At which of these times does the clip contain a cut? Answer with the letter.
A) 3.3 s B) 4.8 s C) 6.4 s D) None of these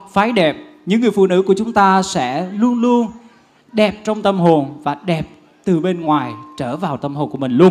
D